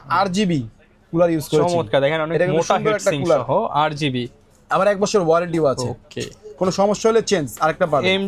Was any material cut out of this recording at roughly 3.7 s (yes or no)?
no